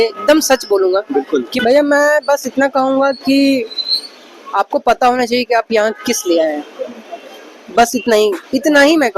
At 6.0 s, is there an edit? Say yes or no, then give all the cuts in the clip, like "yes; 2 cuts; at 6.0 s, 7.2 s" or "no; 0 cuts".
no; 1 cut; at 1.5 s